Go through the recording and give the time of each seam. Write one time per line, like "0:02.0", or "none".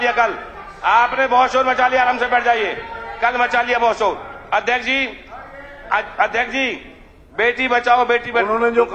none